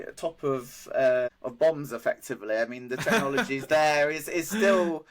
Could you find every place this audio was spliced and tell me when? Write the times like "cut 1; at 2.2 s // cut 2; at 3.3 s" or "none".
cut 1; at 1.4 s